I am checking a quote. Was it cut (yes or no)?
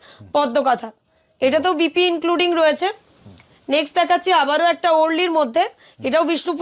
no